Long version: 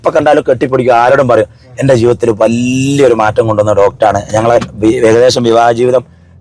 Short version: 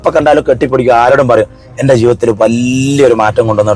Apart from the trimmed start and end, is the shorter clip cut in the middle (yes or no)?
no